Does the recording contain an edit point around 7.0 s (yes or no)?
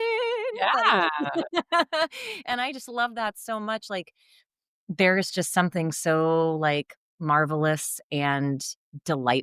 no